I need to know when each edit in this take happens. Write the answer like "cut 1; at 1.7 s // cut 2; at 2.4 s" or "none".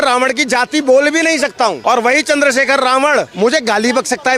cut 1; at 1.8 s // cut 2; at 3.3 s